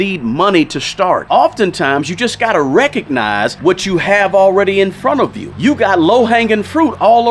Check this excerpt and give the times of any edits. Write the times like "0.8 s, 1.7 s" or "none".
1.2 s, 3.5 s, 5.4 s